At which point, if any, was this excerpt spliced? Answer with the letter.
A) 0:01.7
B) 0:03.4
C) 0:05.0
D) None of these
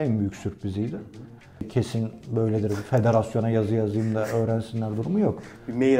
A